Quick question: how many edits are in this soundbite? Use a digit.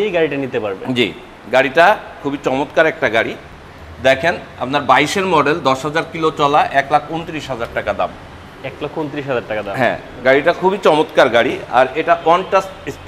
0